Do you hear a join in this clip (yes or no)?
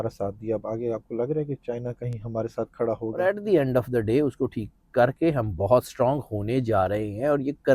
yes